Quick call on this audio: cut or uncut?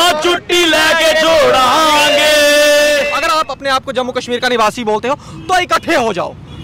cut